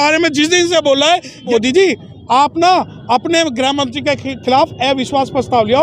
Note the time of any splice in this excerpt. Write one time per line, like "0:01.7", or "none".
0:01.5